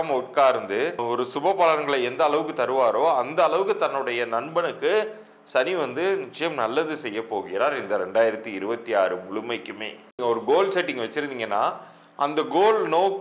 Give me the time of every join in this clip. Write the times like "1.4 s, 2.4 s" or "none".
1.0 s, 10.1 s